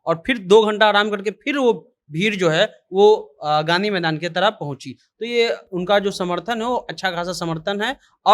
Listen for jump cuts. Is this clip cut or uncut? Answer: uncut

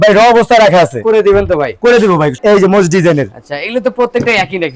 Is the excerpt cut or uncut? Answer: cut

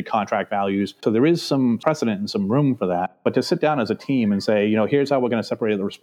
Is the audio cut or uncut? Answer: uncut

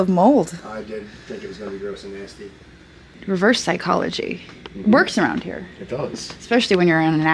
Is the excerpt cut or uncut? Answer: cut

